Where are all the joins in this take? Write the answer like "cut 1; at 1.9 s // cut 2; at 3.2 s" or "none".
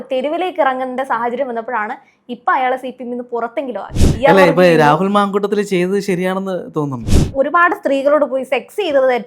cut 1; at 4.1 s // cut 2; at 7.2 s